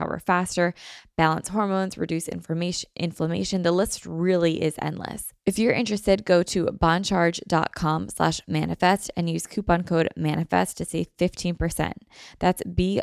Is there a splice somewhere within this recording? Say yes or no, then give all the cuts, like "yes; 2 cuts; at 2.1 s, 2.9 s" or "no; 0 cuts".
yes; 1 cut; at 5.3 s